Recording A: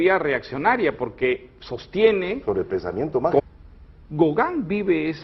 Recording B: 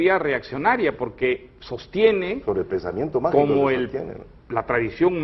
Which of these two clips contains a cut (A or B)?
B